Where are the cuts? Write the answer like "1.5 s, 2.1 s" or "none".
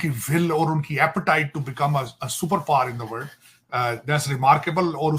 none